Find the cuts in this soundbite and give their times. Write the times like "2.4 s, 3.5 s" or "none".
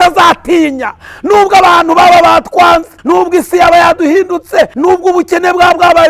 2.9 s, 4.7 s

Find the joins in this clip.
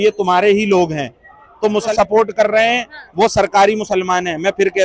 1.9 s

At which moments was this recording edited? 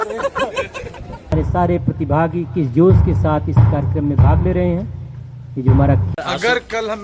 1.3 s, 6.1 s

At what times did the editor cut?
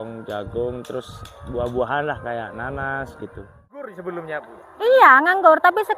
4.0 s

